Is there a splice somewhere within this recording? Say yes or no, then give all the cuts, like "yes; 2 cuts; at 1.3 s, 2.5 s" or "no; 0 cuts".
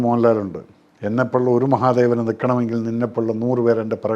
no; 0 cuts